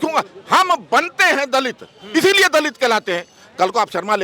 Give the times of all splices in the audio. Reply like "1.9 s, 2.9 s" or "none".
none